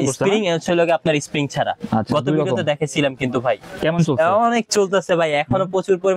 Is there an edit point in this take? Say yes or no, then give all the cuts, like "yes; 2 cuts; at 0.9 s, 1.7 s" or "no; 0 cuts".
no; 0 cuts